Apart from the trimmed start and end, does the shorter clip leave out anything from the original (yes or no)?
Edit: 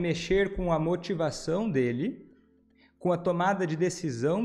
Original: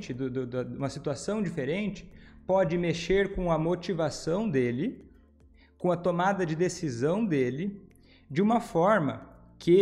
no